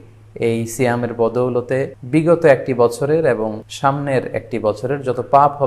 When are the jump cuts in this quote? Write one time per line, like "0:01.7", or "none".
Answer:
0:02.0
0:03.7